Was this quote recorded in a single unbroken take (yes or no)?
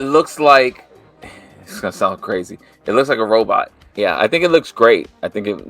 no